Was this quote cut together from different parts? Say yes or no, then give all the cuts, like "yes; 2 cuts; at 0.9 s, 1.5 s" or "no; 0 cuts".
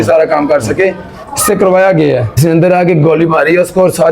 yes; 1 cut; at 2.3 s